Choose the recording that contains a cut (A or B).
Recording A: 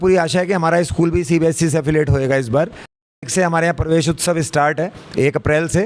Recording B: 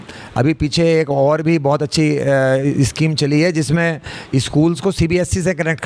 A